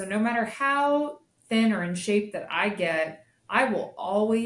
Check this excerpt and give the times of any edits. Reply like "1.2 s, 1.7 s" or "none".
none